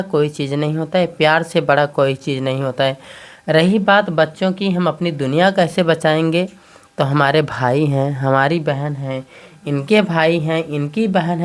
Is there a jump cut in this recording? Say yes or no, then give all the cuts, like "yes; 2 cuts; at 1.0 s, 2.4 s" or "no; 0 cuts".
no; 0 cuts